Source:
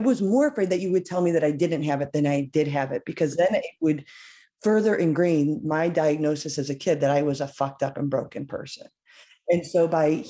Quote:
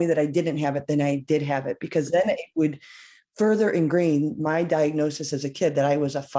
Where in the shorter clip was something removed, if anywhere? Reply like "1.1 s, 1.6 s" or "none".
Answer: none